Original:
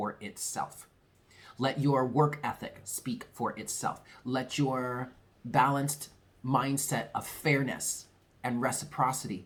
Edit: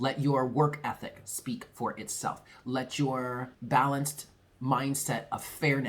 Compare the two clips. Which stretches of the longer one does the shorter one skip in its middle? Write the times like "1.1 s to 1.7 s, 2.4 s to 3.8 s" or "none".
5.1 s to 5.3 s